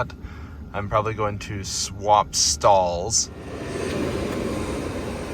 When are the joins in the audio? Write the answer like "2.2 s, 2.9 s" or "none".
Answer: 3.5 s